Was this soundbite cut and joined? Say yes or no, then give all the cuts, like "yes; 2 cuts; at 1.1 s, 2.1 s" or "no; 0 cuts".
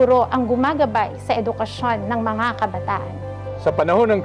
no; 0 cuts